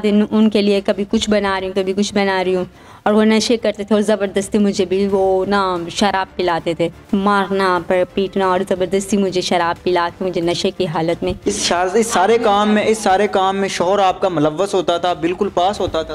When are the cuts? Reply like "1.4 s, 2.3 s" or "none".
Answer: 7.0 s